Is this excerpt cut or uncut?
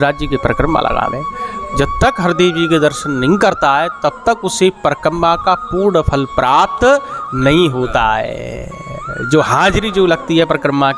uncut